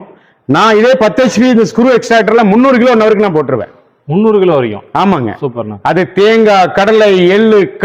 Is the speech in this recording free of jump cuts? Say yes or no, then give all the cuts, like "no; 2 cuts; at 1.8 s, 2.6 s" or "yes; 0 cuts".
yes; 0 cuts